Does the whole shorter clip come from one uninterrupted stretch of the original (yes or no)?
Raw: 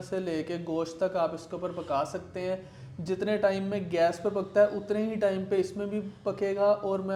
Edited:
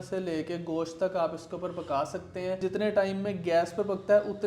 no